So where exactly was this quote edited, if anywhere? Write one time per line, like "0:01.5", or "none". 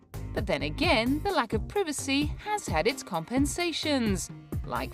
0:02.0